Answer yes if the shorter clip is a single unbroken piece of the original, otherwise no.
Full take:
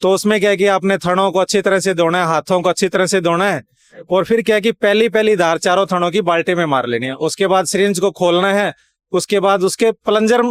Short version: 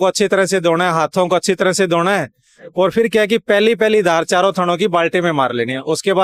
yes